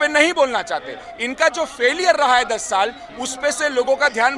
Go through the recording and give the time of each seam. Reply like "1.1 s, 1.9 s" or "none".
none